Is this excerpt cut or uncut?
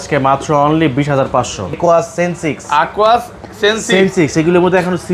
cut